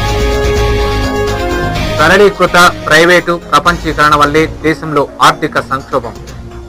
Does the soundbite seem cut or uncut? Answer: uncut